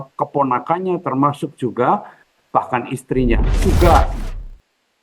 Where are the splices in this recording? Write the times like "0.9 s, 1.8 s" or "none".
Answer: 3.6 s